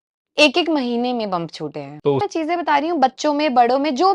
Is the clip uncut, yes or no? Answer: no